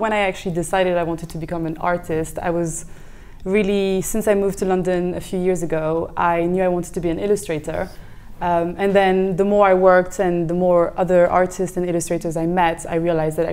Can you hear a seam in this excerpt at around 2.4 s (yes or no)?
no